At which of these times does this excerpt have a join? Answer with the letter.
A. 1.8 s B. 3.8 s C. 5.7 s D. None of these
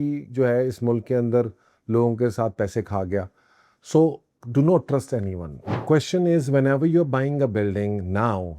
C